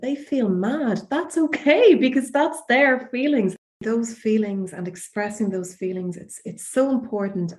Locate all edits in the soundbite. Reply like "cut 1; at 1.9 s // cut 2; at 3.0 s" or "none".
cut 1; at 3.8 s